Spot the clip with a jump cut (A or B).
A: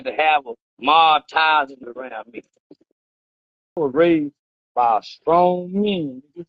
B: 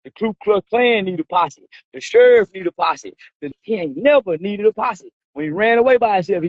A